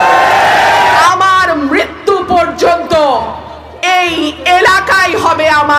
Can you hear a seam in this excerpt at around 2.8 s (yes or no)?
no